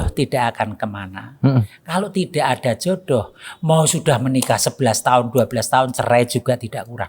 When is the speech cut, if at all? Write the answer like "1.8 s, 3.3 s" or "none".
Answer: none